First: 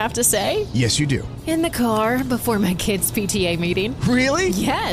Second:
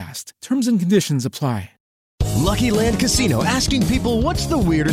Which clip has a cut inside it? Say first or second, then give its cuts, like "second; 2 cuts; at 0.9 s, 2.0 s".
second; 1 cut; at 2.2 s